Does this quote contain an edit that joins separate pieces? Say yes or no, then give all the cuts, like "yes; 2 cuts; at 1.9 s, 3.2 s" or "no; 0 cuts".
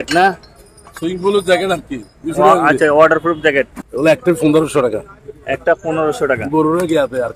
yes; 1 cut; at 4.2 s